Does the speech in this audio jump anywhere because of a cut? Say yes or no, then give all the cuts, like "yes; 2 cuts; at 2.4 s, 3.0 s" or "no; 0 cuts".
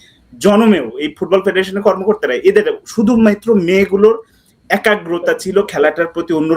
no; 0 cuts